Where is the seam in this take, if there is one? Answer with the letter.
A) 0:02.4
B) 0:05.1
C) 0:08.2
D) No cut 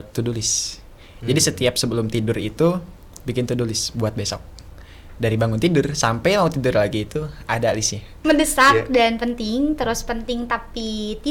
C